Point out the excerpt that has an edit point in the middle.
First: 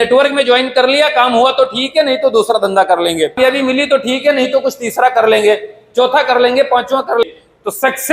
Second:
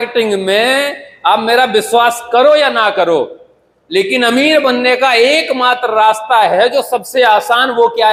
first; 2 cuts; at 3.4 s, 7.2 s

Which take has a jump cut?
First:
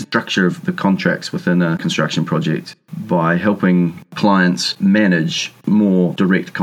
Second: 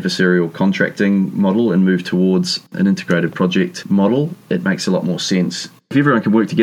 second; 3 cuts; at 2.7 s, 4.4 s, 5.9 s

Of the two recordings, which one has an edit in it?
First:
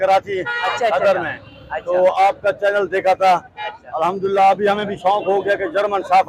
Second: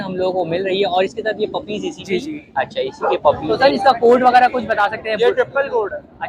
second; 1 cut; at 3.4 s

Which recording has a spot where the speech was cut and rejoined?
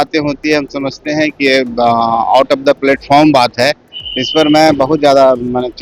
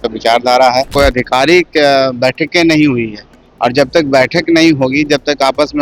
second; 1 cut; at 0.9 s

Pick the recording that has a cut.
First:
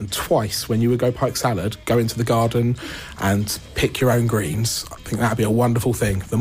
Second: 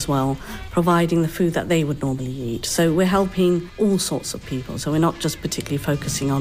first; 1 cut; at 3.6 s

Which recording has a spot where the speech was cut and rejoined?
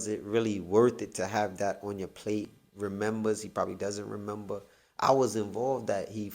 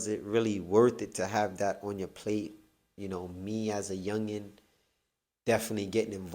first; 1 cut; at 2.6 s

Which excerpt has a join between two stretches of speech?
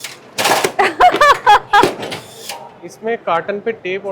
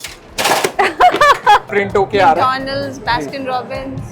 second; 1 cut; at 1.7 s

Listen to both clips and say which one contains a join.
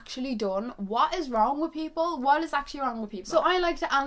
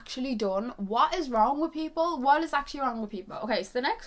first; 1 cut; at 3.1 s

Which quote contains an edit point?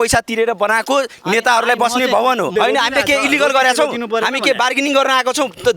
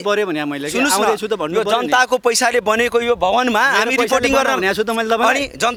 first; 1 cut; at 2.5 s

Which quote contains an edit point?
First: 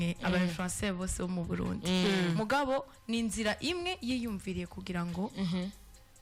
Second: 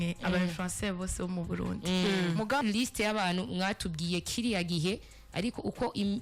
second; 1 cut; at 2.6 s

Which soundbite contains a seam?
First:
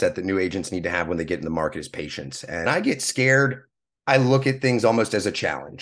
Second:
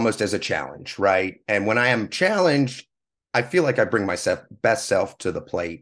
first; 1 cut; at 2.7 s

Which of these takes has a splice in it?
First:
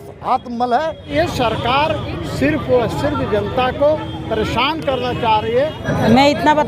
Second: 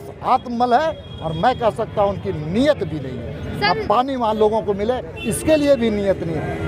first; 2 cuts; at 1.0 s, 5.9 s

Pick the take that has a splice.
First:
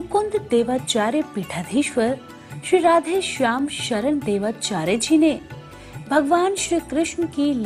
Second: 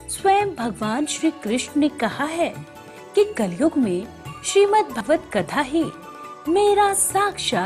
second; 1 cut; at 5.0 s

